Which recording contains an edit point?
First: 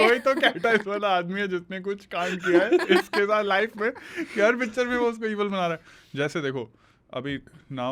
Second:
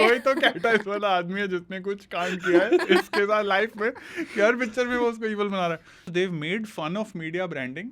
second; 1 cut; at 6.1 s

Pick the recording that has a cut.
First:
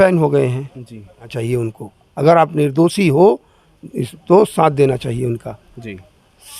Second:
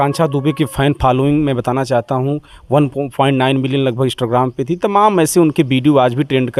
first; 1 cut; at 1.3 s

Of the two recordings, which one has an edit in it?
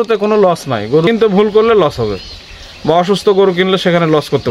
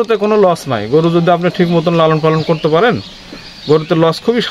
first; 1 cut; at 1.1 s

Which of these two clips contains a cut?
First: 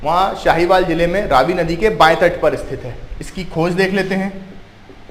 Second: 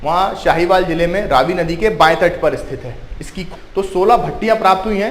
second; 1 cut; at 3.4 s

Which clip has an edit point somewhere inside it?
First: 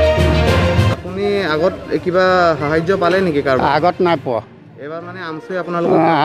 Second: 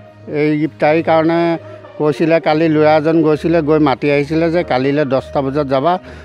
first; 1 cut; at 0.9 s

